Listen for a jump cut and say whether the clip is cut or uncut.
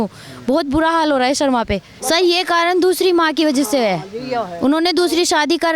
cut